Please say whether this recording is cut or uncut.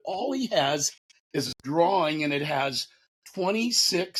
uncut